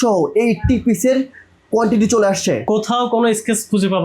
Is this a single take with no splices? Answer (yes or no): no